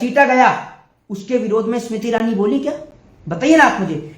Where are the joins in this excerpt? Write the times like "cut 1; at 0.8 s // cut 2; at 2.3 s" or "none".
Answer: none